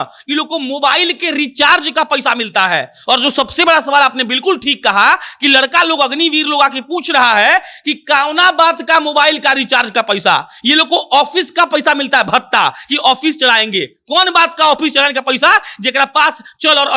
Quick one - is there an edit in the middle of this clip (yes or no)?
no